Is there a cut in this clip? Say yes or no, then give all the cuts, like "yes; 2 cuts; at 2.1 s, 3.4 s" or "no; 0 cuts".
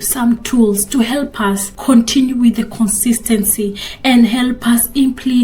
yes; 1 cut; at 1.7 s